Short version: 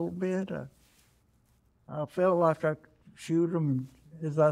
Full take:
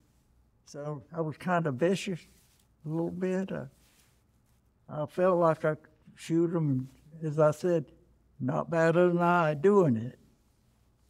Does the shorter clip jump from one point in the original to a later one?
no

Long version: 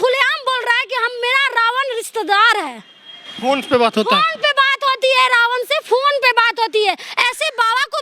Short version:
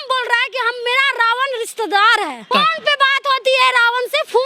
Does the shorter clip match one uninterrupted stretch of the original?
no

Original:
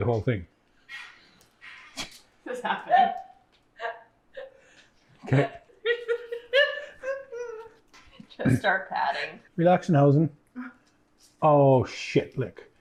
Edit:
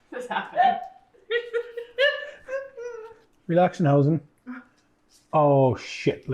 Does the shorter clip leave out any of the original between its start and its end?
yes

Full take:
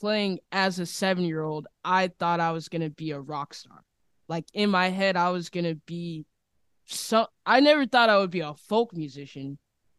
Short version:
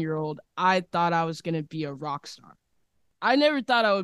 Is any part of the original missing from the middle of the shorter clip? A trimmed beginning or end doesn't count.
yes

